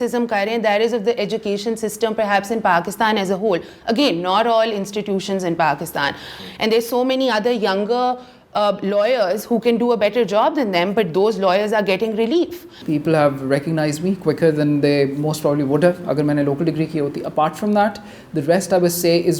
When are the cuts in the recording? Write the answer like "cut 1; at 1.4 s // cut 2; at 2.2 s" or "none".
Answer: cut 1; at 6.4 s // cut 2; at 12.7 s